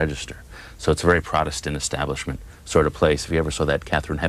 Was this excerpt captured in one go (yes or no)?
no